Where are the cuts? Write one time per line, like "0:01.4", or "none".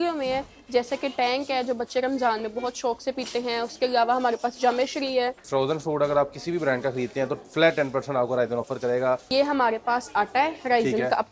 0:05.4
0:09.2